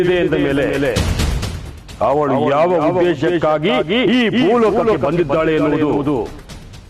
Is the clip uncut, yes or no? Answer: yes